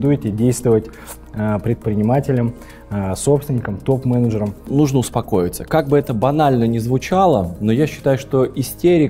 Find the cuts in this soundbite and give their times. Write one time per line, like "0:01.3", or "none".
0:04.7